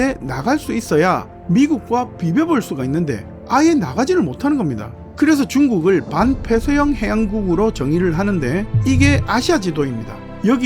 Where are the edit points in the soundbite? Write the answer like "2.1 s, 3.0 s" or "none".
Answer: 1.4 s, 5.0 s, 8.7 s